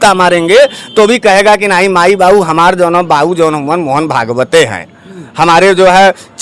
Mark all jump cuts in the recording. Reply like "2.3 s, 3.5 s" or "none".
none